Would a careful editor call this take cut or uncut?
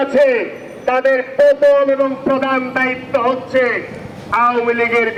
uncut